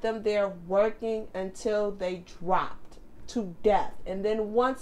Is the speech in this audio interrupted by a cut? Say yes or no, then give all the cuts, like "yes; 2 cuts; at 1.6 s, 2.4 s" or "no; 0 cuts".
no; 0 cuts